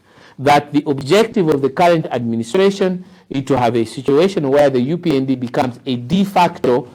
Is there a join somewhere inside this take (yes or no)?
no